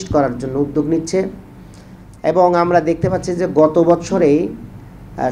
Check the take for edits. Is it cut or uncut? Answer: uncut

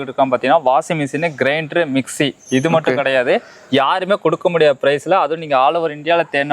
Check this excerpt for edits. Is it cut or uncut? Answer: uncut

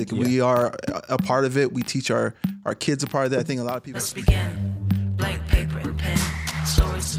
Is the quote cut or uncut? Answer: cut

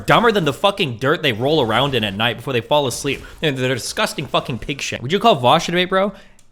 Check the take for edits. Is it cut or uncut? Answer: cut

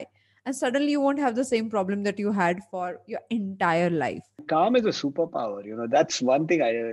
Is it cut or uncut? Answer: cut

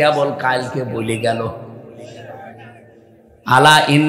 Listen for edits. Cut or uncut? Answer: uncut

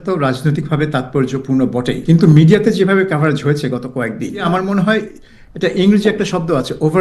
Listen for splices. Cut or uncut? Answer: uncut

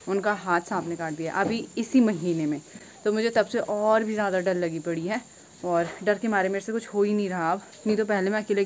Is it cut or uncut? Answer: uncut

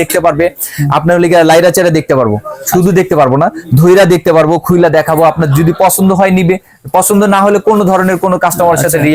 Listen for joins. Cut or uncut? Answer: uncut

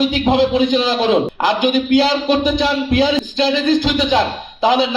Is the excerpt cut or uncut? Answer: cut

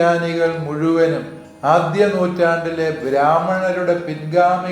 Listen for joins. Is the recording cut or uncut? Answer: uncut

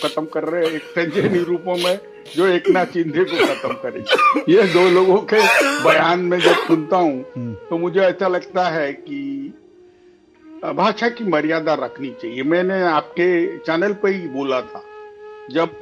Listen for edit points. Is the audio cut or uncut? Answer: uncut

